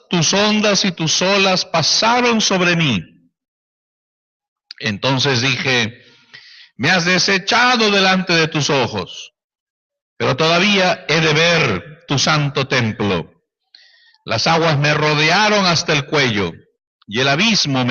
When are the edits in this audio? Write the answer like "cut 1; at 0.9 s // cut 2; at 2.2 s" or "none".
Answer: cut 1; at 13.3 s